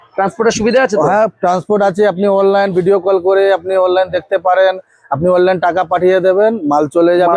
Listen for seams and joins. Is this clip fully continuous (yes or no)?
yes